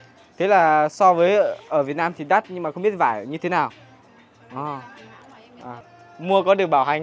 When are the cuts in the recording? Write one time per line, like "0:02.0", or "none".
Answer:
0:05.9